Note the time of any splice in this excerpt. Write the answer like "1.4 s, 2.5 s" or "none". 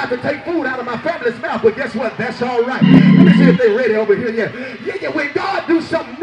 none